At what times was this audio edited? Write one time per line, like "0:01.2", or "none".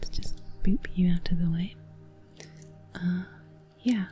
none